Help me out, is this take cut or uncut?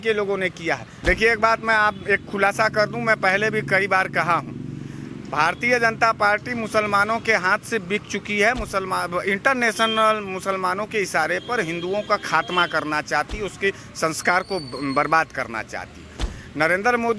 cut